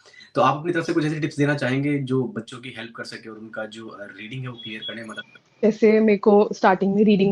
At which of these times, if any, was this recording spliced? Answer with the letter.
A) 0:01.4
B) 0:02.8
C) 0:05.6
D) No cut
C